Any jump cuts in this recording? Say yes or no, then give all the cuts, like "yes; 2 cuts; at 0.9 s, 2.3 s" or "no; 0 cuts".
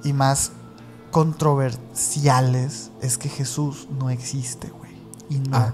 no; 0 cuts